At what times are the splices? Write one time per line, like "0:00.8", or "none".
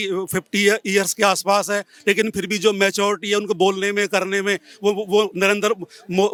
none